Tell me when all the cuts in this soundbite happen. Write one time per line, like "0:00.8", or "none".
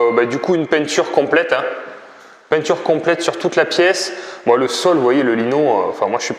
none